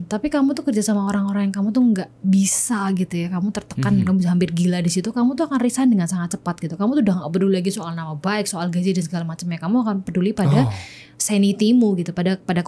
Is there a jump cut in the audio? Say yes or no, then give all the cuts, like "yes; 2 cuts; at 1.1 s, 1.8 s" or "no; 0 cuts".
no; 0 cuts